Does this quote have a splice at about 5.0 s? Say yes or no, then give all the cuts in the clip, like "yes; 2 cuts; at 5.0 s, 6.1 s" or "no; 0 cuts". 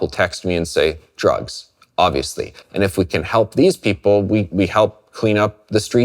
no; 1 cut; at 2.6 s